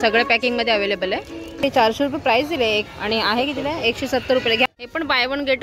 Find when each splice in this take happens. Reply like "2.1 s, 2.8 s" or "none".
1.6 s, 4.7 s